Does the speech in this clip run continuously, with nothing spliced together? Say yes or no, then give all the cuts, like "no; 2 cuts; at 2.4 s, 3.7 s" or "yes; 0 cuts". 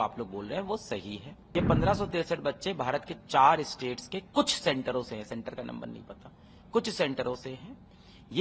no; 1 cut; at 1.3 s